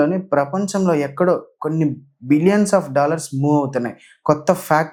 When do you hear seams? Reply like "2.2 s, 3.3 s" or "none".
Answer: none